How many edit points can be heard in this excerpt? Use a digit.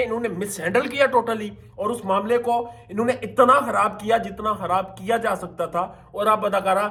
0